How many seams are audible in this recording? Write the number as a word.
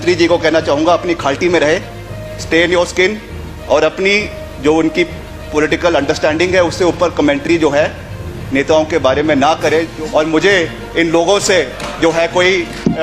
one